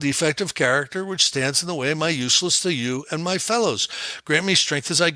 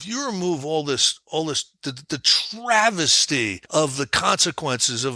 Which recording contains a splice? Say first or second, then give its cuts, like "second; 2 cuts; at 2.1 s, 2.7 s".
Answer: second; 1 cut; at 3.6 s